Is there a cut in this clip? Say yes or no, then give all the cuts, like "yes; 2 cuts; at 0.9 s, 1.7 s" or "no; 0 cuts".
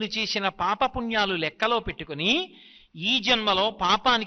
no; 0 cuts